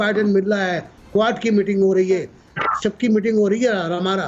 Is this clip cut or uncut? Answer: uncut